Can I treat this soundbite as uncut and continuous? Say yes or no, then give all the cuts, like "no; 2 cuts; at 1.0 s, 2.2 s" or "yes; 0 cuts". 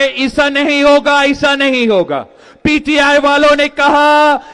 yes; 0 cuts